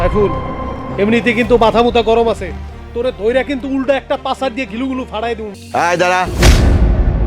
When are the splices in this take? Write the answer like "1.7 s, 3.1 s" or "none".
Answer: 5.5 s